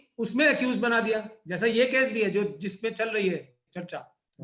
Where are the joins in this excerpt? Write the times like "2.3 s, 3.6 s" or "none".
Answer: none